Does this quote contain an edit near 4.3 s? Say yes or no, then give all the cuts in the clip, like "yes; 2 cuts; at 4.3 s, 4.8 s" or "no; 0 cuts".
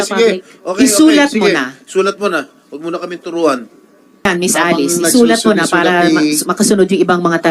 yes; 1 cut; at 4.3 s